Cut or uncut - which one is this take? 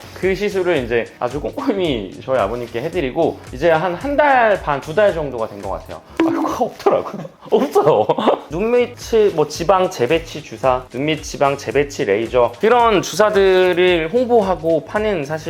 cut